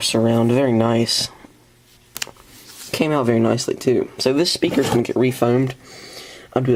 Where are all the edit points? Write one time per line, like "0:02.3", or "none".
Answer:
none

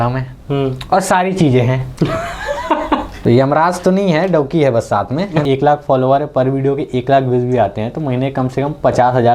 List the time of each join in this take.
0:03.1
0:05.4

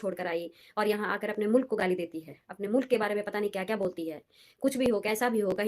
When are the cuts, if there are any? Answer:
none

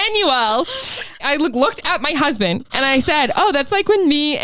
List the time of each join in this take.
0:01.2
0:02.7

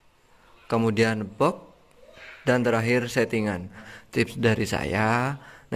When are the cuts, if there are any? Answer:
0:03.9

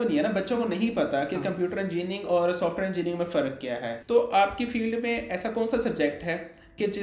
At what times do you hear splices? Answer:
0:04.0

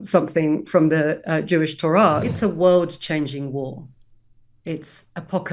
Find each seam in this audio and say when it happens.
0:02.2

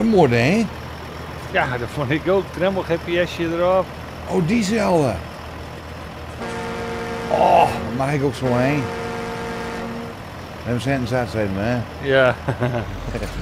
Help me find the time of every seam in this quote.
none

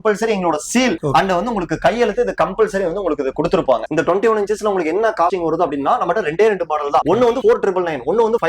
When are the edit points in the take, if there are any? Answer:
0:03.9

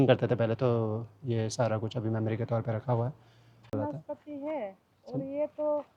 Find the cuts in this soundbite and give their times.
0:03.7

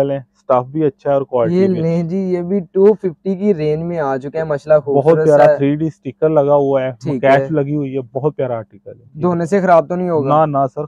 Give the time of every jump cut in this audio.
none

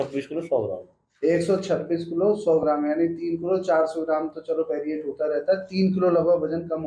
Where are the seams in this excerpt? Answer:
none

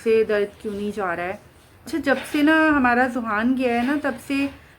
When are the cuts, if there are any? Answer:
0:01.9

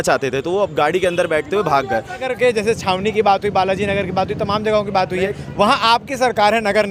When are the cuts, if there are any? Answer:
0:02.2

